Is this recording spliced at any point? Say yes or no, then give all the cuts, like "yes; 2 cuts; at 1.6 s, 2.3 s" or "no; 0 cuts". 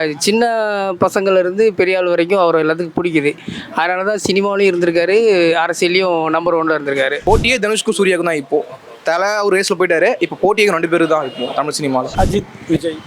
yes; 2 cuts; at 7.2 s, 12.1 s